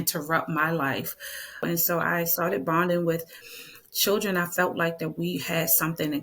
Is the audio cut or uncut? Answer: cut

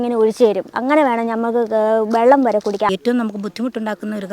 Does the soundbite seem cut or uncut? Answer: cut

